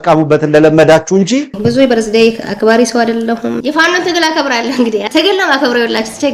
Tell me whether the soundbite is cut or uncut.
cut